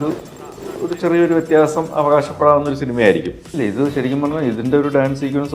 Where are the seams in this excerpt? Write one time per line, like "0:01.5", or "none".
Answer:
0:03.5